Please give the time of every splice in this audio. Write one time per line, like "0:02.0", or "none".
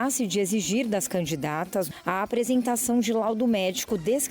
0:01.9